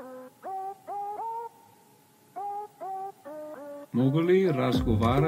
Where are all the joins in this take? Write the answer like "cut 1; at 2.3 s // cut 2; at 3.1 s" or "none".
cut 1; at 3.8 s